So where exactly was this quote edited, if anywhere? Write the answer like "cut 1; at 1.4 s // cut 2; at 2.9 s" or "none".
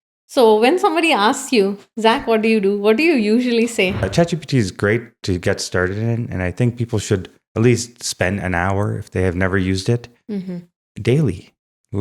cut 1; at 4.0 s